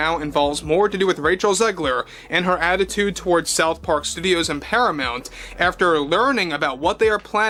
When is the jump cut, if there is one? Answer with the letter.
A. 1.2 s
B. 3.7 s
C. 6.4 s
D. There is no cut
D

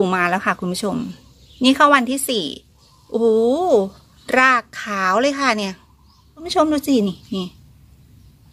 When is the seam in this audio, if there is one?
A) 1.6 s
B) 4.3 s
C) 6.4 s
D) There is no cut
C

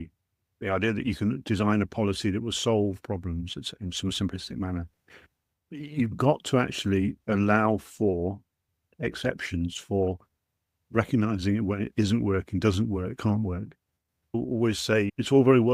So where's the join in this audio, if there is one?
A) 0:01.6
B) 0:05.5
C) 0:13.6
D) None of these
D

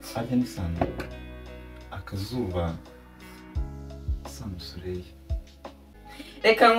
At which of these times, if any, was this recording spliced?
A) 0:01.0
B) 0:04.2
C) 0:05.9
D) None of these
C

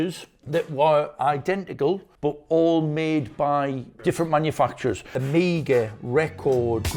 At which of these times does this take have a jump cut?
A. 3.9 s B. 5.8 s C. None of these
A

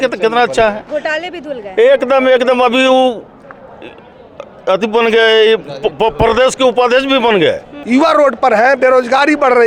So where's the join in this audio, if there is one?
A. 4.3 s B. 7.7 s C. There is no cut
B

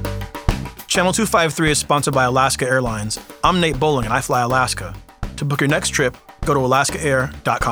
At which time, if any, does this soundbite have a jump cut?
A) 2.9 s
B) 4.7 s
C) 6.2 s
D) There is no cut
D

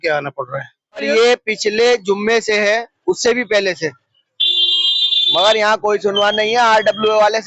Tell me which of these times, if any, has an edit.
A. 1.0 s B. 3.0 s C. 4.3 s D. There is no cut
A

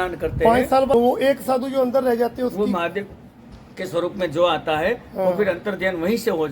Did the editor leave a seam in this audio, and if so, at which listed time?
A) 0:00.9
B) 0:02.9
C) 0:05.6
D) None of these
A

